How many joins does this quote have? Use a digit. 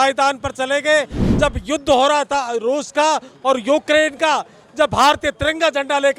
0